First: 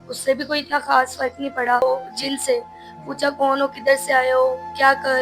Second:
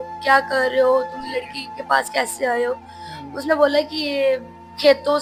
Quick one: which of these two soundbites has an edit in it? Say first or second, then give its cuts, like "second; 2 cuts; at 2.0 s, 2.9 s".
first; 1 cut; at 1.8 s